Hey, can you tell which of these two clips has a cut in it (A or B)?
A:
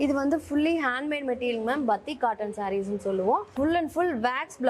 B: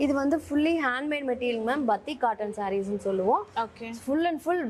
A